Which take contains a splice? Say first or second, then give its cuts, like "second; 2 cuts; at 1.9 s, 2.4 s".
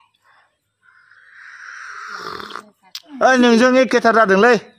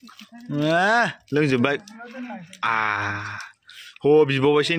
first; 1 cut; at 3.0 s